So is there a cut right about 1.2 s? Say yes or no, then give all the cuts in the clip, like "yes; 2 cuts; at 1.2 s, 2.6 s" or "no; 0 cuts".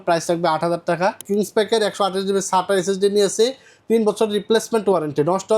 yes; 1 cut; at 1.2 s